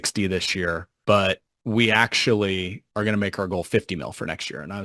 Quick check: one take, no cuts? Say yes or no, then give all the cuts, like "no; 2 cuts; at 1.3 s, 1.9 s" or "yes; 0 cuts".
no; 3 cuts; at 0.9 s, 1.5 s, 2.8 s